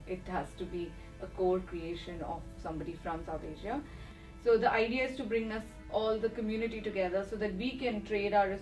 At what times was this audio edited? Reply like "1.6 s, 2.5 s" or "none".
4.1 s

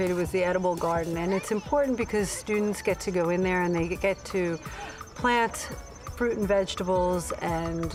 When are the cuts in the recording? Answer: none

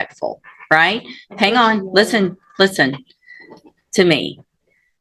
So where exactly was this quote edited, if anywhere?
none

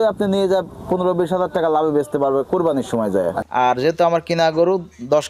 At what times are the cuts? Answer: 3.4 s

